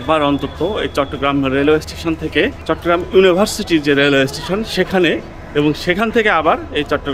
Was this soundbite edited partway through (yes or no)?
yes